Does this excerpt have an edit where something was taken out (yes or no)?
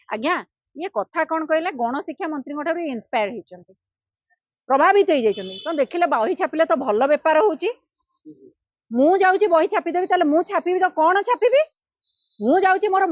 no